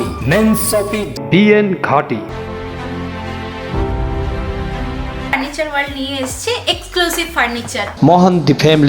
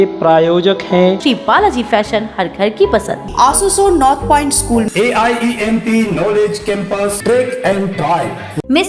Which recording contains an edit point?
first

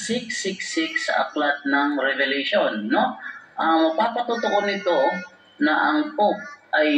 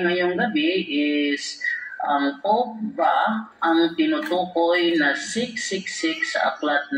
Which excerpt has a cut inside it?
first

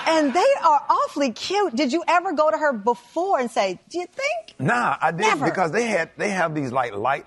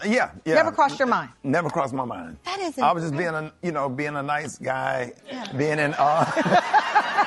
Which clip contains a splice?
second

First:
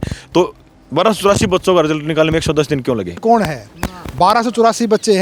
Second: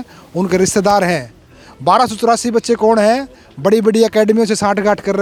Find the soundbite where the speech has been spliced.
first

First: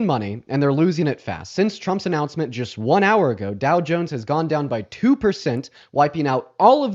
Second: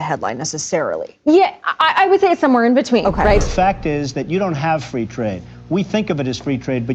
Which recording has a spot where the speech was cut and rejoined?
second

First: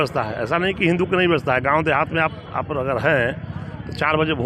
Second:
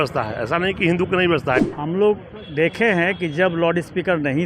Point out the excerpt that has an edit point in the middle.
second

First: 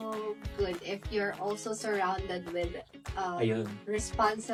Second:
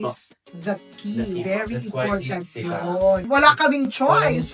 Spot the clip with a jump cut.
second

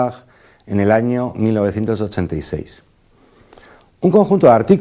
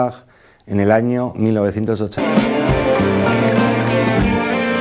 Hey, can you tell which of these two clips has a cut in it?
first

